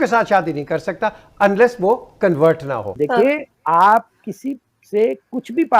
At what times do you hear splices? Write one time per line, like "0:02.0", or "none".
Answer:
0:02.9